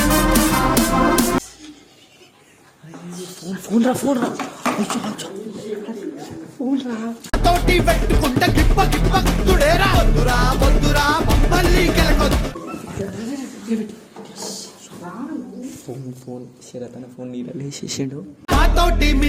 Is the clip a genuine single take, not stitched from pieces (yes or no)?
yes